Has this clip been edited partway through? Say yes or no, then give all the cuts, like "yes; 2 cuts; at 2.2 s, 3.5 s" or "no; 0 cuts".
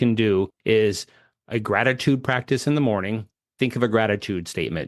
yes; 1 cut; at 3.2 s